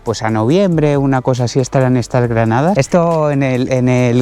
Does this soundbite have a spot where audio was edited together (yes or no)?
yes